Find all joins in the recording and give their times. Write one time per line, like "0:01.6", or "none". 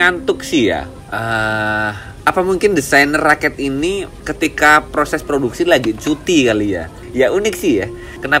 0:01.0
0:02.1
0:07.0